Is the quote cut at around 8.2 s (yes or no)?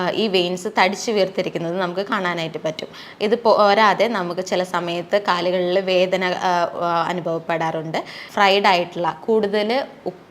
yes